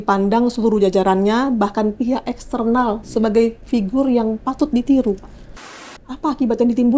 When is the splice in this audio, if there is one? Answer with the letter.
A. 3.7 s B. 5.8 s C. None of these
B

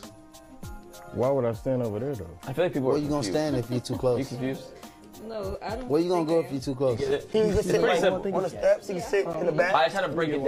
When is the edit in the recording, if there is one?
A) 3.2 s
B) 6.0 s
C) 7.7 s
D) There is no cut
A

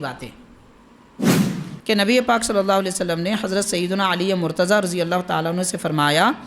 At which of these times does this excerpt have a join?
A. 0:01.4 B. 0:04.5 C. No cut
A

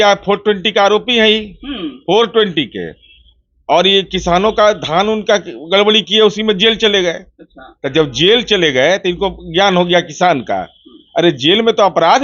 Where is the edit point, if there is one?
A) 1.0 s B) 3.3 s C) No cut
C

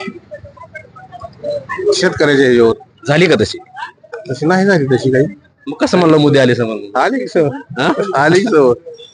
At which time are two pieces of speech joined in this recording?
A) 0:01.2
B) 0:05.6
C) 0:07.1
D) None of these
D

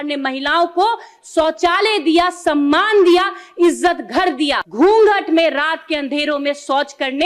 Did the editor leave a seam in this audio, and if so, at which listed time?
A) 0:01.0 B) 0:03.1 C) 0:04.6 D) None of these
C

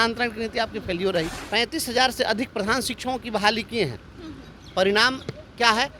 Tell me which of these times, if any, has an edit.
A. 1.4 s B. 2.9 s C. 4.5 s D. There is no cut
A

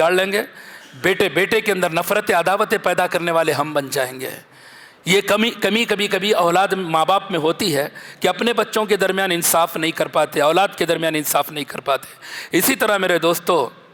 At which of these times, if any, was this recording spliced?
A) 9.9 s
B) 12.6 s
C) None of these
C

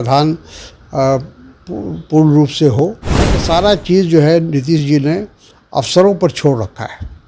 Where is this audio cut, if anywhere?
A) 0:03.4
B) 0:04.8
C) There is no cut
A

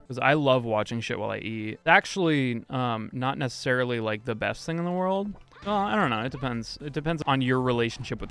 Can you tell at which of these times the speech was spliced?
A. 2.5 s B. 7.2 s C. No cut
B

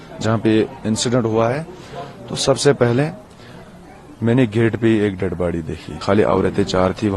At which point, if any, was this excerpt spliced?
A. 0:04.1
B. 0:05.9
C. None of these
B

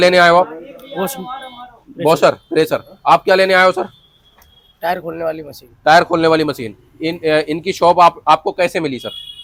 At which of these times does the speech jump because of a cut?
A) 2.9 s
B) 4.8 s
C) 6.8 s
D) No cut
D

